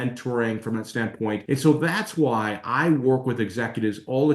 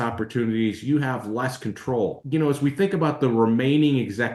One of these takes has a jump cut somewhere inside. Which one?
first; 1 cut; at 1.4 s

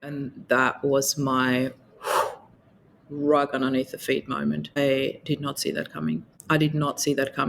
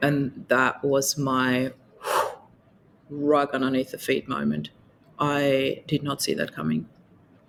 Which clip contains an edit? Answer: first; 2 cuts; at 4.7 s, 6.3 s

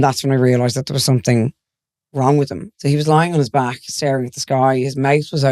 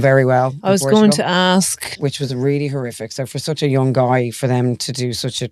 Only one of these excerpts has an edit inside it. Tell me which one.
first; 1 cut; at 2.6 s

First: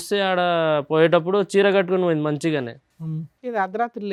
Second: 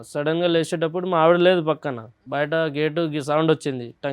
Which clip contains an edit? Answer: second; 1 cut; at 2.2 s

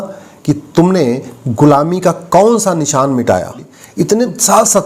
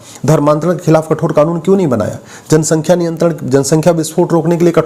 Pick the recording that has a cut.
first; 1 cut; at 3.8 s

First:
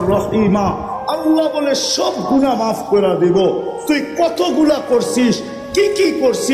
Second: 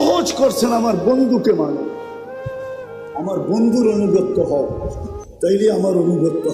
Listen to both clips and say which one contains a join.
second; 2 cuts; at 1.9 s, 3.1 s

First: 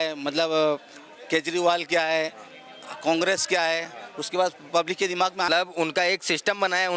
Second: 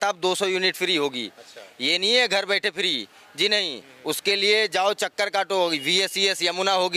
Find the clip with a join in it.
first; 1 cut; at 5.5 s

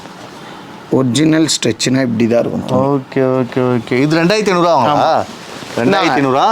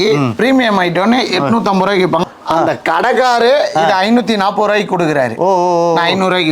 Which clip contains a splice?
second; 1 cut; at 2.2 s

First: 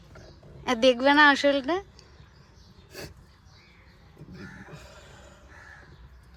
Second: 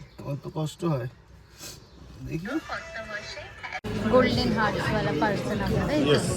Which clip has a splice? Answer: second; 1 cut; at 3.9 s

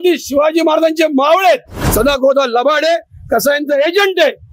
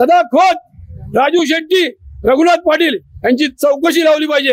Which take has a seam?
first; 1 cut; at 1.8 s

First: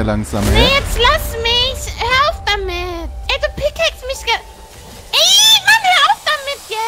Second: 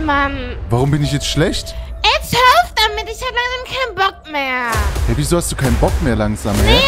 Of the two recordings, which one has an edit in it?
first; 1 cut; at 3.2 s

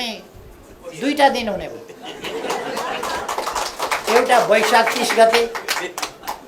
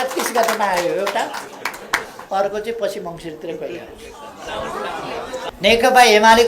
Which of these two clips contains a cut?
second; 2 cuts; at 2.1 s, 5.4 s

